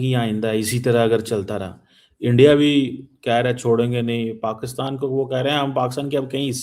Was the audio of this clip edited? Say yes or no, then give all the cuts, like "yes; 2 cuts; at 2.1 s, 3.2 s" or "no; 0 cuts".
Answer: no; 0 cuts